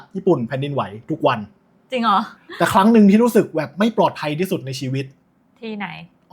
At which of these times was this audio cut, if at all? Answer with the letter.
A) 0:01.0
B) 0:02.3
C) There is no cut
B